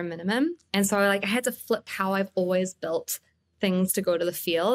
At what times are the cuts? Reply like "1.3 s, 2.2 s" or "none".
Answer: 1.8 s

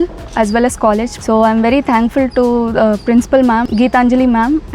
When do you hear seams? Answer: 1.1 s, 3.6 s

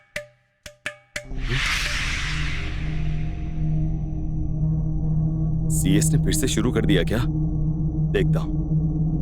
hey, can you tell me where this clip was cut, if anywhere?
0.9 s

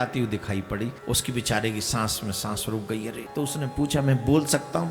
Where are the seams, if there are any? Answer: 1.0 s, 3.2 s

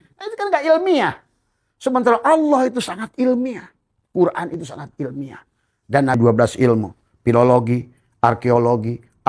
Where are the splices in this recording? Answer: 6.2 s

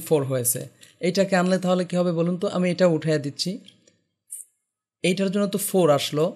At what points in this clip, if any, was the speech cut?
none

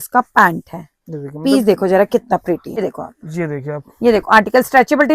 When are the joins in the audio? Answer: 2.7 s

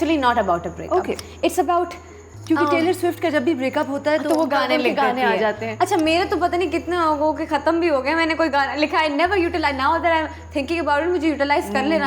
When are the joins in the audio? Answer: none

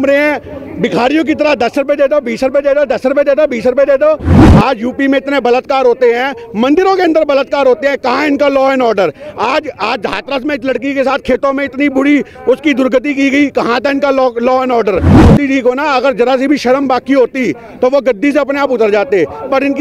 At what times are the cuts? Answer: 4.3 s, 15.2 s

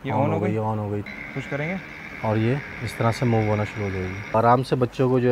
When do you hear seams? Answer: 1.1 s, 4.3 s

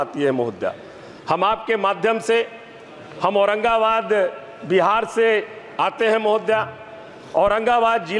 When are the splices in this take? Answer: none

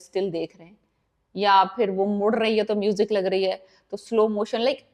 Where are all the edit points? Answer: none

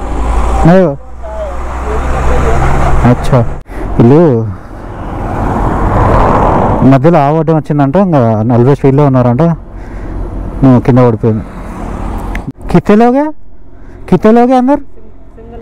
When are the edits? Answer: 3.6 s, 12.3 s

